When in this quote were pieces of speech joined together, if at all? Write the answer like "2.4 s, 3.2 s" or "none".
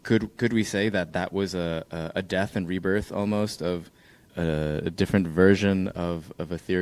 4.3 s

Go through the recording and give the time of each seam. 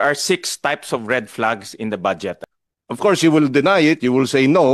2.3 s

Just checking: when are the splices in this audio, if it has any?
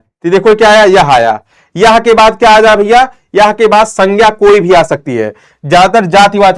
none

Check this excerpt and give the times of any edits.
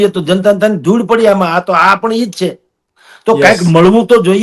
none

